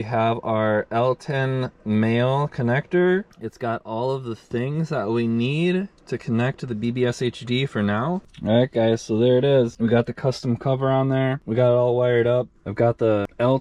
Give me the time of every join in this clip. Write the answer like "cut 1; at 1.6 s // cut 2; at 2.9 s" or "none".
cut 1; at 8.2 s